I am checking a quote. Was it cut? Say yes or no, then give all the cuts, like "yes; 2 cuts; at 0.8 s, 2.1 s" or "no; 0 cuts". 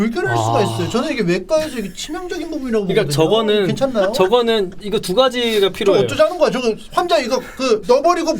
no; 0 cuts